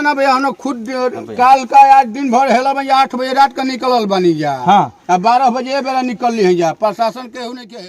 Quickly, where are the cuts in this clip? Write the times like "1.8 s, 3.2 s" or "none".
none